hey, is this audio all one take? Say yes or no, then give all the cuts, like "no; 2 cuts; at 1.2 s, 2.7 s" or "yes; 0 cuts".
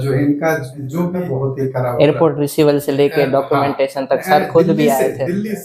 yes; 0 cuts